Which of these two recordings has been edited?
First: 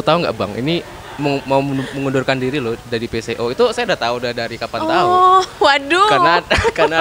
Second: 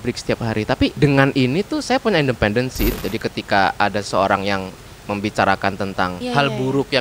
second; 3 cuts; at 0.9 s, 2.9 s, 6.2 s

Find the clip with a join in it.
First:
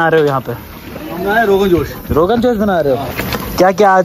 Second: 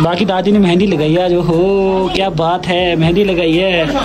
first; 1 cut; at 3.1 s

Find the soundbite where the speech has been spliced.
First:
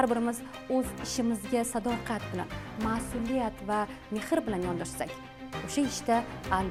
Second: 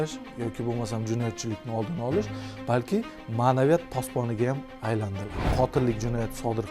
second; 1 cut; at 5.5 s

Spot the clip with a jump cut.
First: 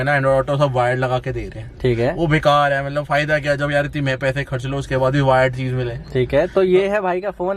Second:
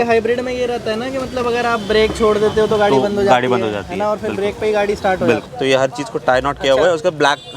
second; 1 cut; at 5.5 s

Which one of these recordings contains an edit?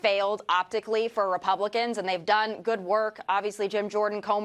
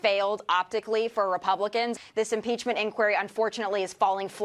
second; 1 cut; at 2.0 s

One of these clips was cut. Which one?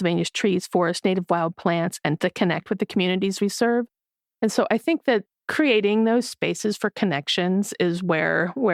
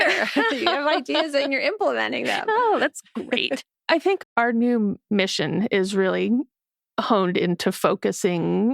second; 1 cut; at 4.2 s

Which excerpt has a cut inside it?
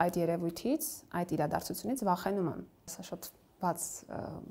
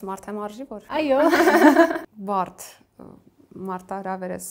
second; 2 cuts; at 0.9 s, 2.2 s

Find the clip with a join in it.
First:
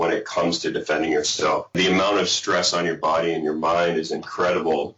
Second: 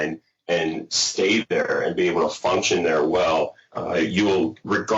first; 1 cut; at 1.8 s

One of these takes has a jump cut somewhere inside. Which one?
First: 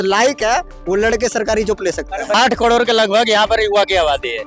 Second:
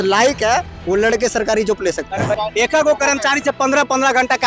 second; 1 cut; at 2.3 s

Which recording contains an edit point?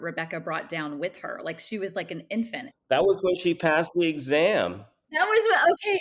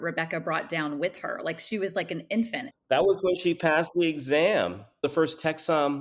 second; 1 cut; at 5.0 s

